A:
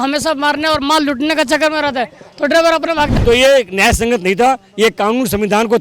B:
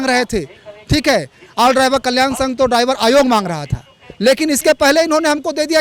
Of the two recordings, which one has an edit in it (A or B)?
A